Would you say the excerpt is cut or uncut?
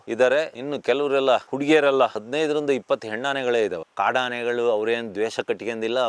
cut